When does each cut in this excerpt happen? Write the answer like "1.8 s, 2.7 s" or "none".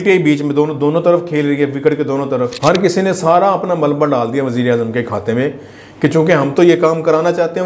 2.5 s